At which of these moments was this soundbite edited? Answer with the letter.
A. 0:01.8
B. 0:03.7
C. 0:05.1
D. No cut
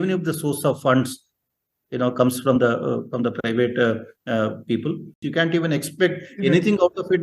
C